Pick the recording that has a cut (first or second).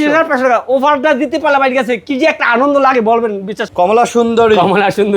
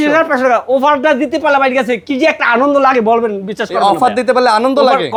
first